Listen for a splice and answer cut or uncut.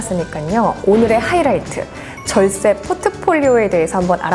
uncut